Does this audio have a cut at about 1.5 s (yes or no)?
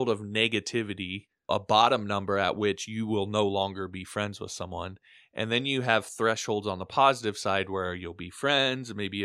yes